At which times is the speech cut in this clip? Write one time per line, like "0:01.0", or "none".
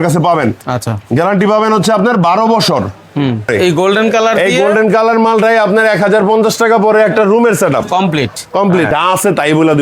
0:03.5
0:08.9